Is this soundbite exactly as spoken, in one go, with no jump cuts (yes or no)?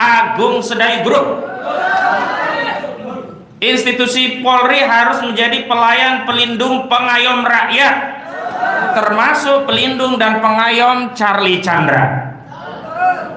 yes